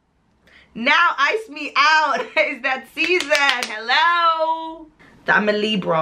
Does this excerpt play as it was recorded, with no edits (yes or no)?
no